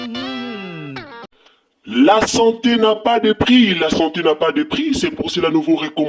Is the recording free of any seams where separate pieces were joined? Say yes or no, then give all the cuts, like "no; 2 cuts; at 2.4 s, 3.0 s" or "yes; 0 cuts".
no; 1 cut; at 1.2 s